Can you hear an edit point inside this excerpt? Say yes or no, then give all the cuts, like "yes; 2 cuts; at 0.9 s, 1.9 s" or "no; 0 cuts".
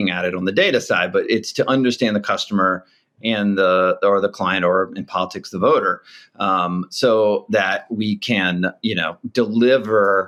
no; 0 cuts